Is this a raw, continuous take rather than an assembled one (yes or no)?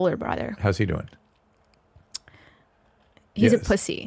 yes